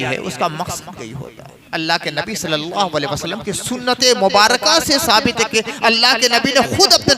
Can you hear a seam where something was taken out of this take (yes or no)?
yes